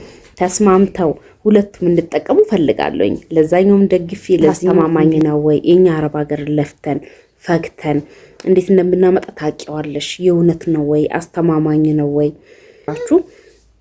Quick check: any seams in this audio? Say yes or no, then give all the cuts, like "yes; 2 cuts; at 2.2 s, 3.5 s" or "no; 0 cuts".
yes; 2 cuts; at 4.8 s, 12.9 s